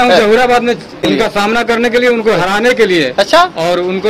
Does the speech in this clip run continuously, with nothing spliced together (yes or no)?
no